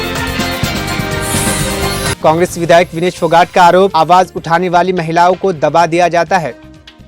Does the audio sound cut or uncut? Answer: uncut